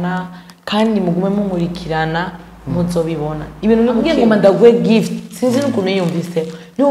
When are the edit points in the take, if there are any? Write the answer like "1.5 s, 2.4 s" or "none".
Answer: 4.1 s